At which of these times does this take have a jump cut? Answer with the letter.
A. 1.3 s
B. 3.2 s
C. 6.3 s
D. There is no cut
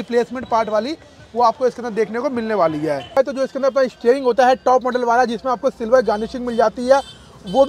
B